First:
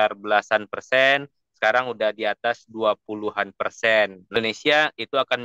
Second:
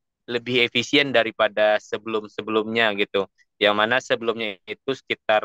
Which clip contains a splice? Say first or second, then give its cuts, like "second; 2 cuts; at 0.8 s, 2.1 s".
first; 1 cut; at 4.4 s